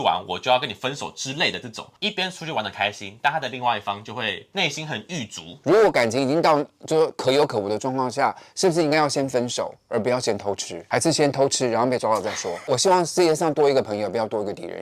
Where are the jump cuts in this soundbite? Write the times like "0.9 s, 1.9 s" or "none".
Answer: 1.9 s, 5.5 s, 12.6 s